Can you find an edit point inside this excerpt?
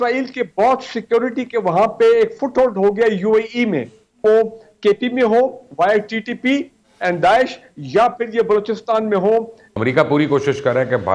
yes; 2 cuts; at 4.2 s, 9.6 s

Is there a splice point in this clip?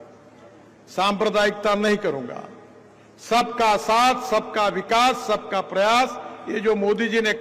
no; 0 cuts

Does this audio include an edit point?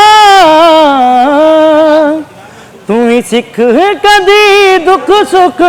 no; 0 cuts

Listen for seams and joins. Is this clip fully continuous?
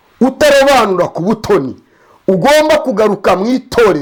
yes; 0 cuts

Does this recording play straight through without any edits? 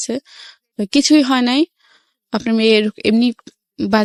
yes; 0 cuts

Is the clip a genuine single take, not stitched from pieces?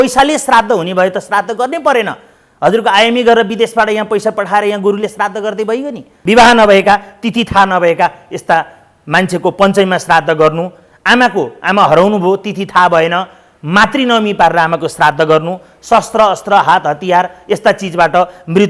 no; 1 cut; at 6.1 s

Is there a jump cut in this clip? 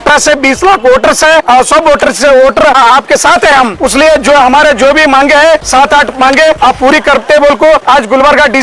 yes; 6 cuts; at 1.4 s, 2.8 s, 3.7 s, 5.7 s, 6.6 s, 7.8 s

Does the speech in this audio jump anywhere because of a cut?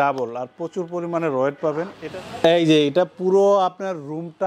yes; 1 cut; at 1.9 s

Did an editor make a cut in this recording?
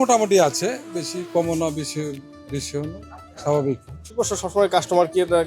yes; 1 cut; at 4.0 s

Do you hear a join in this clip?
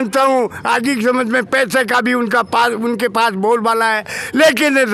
no; 0 cuts

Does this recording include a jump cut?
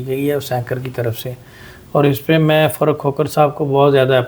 no; 0 cuts

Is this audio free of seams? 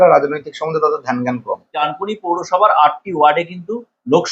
no; 1 cut; at 1.9 s

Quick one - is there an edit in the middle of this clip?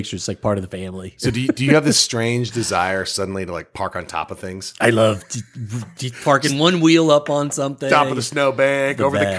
no; 0 cuts

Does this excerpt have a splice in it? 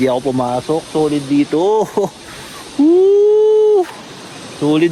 no; 0 cuts

